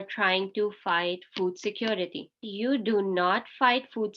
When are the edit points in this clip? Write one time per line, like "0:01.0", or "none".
0:02.5